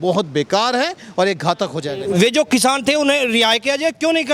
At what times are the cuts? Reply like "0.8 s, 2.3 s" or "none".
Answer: 1.9 s